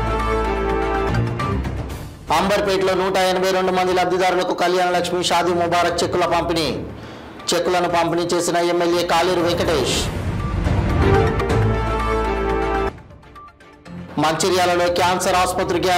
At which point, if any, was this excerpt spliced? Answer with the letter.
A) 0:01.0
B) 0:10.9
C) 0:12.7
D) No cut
A